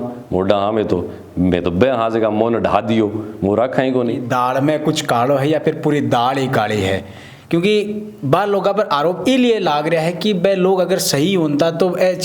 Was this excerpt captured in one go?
no; 1 cut; at 4.2 s

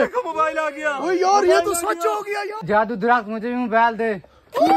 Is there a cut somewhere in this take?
yes; 1 cut; at 2.6 s

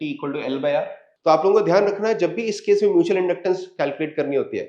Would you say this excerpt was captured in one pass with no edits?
no; 1 cut; at 1.0 s

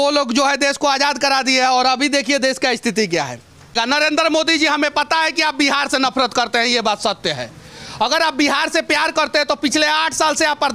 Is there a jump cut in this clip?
yes; 1 cut; at 3.7 s

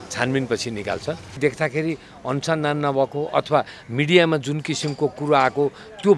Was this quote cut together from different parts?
yes; 1 cut; at 1.4 s

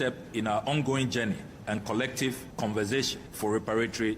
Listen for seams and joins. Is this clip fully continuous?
no; 2 cuts; at 2.5 s, 3.2 s

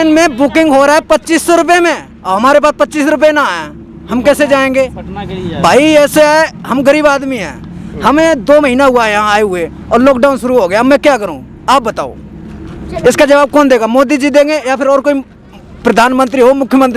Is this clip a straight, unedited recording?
yes; 0 cuts

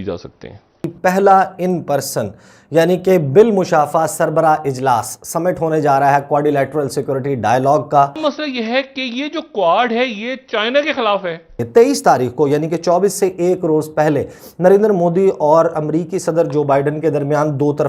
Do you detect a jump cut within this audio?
yes; 3 cuts; at 0.9 s, 8.2 s, 11.6 s

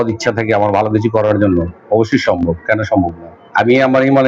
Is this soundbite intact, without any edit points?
no; 1 cut; at 3.3 s

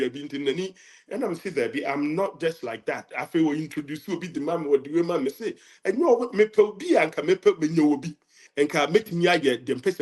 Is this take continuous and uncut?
no; 1 cut; at 8.4 s

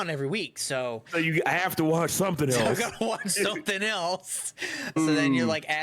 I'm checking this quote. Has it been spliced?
yes; 2 cuts; at 1.0 s, 5.0 s

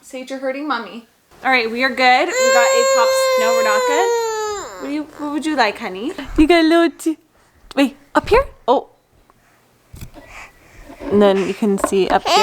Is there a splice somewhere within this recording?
yes; 2 cuts; at 1.2 s, 6.2 s

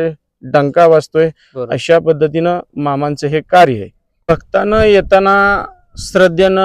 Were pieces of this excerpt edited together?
yes; 1 cut; at 4.3 s

